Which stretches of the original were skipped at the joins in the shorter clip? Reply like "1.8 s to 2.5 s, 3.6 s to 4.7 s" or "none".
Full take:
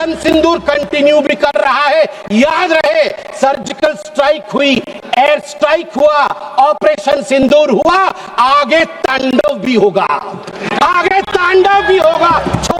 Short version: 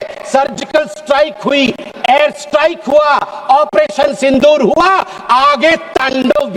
none